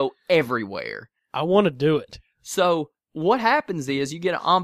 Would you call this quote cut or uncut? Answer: uncut